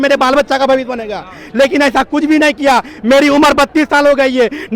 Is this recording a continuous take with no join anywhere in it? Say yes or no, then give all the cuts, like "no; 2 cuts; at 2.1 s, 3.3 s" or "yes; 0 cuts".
yes; 0 cuts